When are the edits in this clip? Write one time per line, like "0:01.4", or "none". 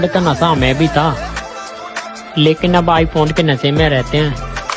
none